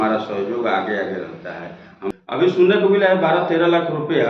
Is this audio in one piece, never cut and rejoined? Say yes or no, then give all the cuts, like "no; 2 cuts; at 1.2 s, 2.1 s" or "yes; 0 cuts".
no; 1 cut; at 2.0 s